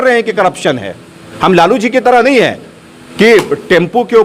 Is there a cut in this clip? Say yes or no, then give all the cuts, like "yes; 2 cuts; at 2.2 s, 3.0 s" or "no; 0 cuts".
no; 0 cuts